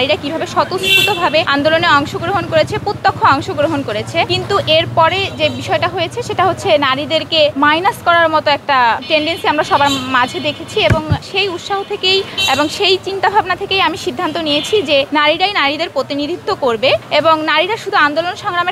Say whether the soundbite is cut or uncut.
cut